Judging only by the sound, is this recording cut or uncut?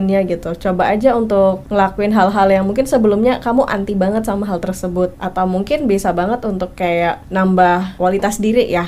cut